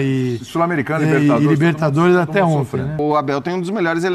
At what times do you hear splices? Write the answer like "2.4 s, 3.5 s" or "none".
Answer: 3.0 s